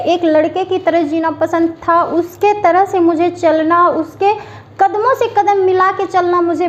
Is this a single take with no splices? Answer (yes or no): yes